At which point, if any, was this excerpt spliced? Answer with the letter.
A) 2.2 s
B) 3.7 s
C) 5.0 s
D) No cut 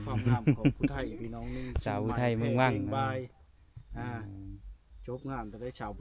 D